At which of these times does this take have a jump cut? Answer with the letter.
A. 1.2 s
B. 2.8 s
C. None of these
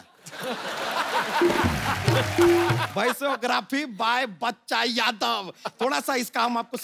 B